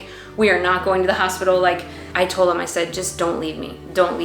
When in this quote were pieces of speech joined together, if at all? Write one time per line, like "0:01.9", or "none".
0:02.0